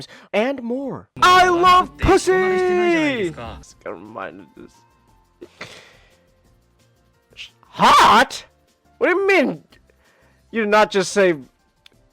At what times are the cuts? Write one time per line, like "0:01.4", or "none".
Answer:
0:01.0